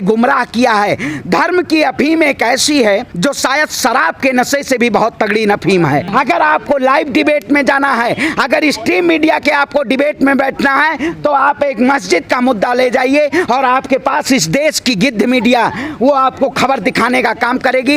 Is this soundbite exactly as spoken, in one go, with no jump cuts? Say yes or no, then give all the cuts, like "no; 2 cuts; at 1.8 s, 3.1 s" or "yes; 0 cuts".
no; 2 cuts; at 3.1 s, 6.1 s